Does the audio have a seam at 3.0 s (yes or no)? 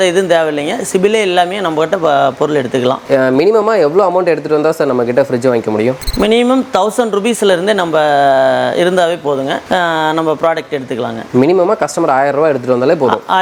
no